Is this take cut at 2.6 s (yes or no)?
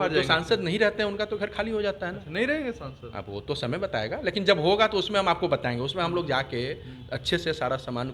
no